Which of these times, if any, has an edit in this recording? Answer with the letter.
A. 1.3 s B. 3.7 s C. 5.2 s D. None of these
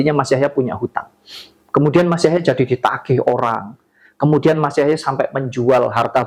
D